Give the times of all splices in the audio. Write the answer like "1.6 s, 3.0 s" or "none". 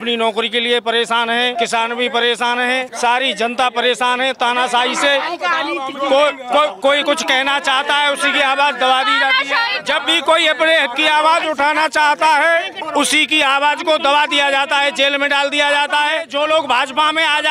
1.5 s, 2.9 s, 9.7 s, 12.8 s, 16.3 s